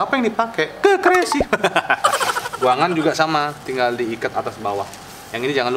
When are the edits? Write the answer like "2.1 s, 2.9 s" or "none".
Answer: 2.5 s

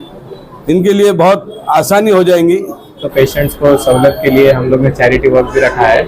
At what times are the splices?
3.1 s

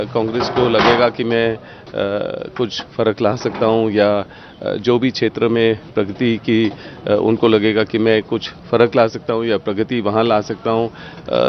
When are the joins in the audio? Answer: none

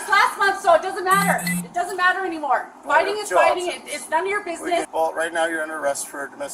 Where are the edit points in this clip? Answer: 4.9 s

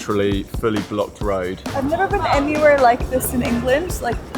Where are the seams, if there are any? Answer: 1.6 s

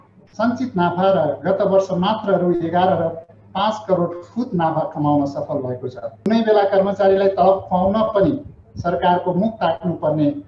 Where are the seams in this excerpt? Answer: 6.2 s

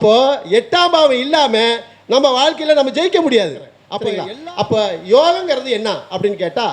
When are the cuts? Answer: 4.0 s

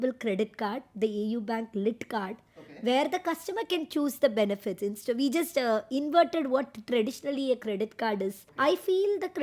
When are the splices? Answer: 8.5 s

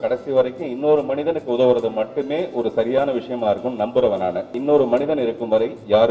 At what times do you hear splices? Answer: 4.5 s

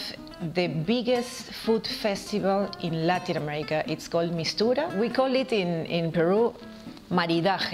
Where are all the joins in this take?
4.9 s

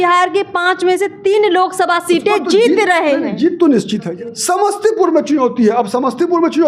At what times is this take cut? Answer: 4.0 s

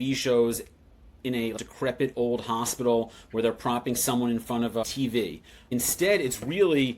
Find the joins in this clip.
1.5 s, 5.5 s

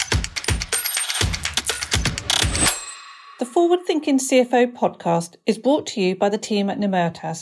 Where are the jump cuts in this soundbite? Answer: 3.2 s

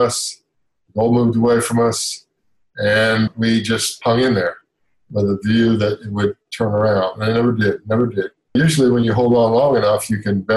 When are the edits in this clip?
3.3 s, 8.5 s

